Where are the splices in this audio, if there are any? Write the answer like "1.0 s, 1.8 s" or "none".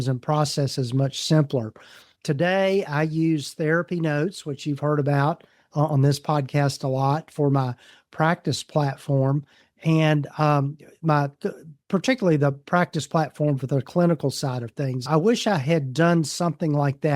15.0 s